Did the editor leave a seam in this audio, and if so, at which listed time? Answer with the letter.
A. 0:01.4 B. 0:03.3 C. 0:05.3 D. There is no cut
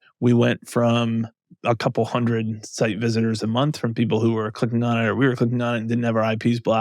A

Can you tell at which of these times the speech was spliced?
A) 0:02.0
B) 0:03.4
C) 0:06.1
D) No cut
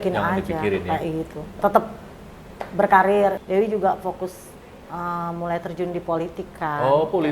B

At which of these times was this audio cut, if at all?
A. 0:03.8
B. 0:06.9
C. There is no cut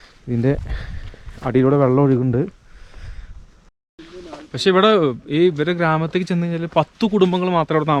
A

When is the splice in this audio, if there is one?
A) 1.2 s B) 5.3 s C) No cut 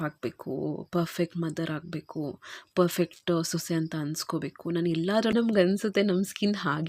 B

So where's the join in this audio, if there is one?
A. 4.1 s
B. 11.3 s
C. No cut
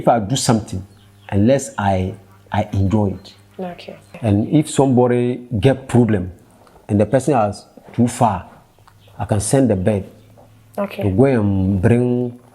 A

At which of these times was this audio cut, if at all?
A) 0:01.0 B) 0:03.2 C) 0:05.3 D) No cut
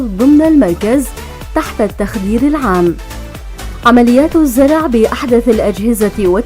C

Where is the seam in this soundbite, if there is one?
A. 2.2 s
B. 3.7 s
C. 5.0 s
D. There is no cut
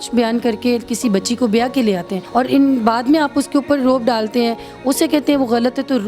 A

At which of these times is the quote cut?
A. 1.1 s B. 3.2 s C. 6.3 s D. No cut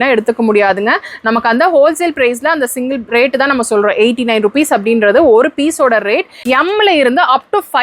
C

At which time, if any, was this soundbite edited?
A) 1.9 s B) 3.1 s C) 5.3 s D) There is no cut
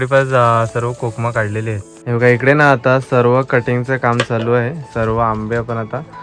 A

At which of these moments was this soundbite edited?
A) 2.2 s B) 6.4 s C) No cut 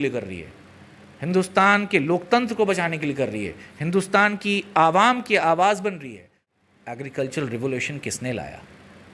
B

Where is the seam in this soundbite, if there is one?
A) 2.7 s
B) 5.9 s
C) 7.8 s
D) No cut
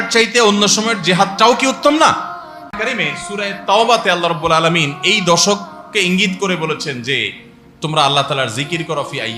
A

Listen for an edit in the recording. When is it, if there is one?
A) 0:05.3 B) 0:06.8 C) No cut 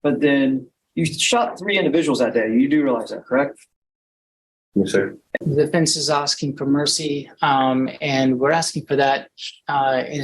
A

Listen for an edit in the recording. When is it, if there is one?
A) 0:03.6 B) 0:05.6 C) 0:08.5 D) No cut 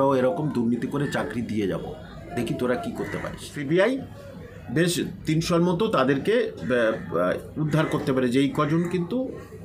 A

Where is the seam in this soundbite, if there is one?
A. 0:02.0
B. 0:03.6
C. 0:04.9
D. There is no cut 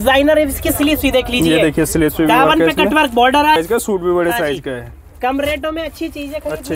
B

